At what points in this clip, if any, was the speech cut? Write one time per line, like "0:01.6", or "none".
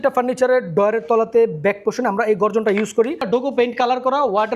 0:03.2